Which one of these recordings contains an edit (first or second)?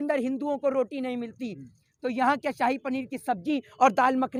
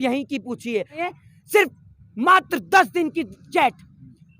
second